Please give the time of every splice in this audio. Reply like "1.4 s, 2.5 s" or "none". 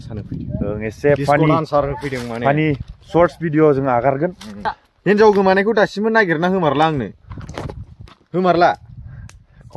4.6 s